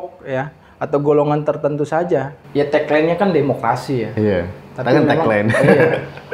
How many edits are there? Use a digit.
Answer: 1